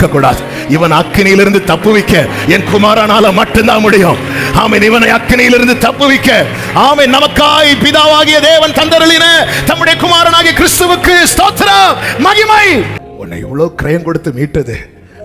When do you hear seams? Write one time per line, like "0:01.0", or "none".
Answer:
0:13.0